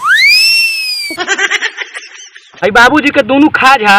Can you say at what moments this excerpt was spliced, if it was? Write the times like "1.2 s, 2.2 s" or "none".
none